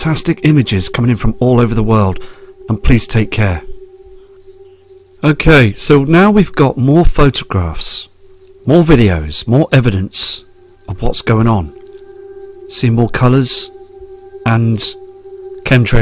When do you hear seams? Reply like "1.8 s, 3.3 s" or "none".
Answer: 11.2 s